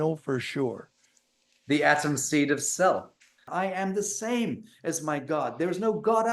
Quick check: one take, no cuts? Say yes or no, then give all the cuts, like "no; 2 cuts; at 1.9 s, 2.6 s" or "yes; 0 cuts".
no; 1 cut; at 3.4 s